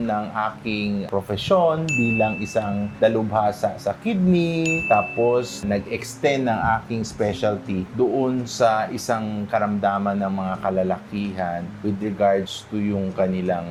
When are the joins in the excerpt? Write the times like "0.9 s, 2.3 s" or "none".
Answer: none